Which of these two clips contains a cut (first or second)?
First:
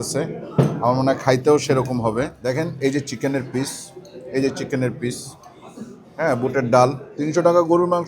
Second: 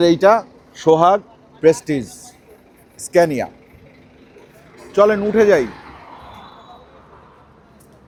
first